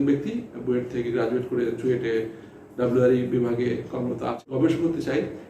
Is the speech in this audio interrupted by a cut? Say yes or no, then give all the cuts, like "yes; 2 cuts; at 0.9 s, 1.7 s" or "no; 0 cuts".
yes; 1 cut; at 4.4 s